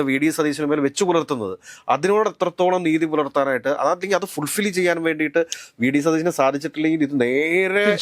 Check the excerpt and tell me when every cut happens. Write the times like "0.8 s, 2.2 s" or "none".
none